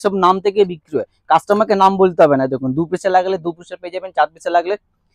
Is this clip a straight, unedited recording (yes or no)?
yes